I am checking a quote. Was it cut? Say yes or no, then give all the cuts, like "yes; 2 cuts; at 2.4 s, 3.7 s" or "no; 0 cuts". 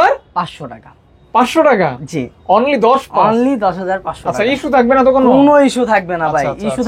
no; 0 cuts